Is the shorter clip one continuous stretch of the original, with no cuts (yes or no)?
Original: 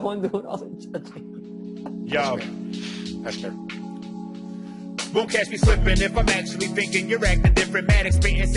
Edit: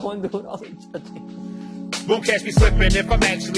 no